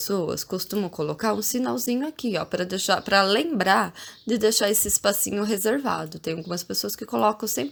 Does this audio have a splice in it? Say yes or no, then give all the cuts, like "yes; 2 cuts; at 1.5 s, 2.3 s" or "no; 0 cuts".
no; 0 cuts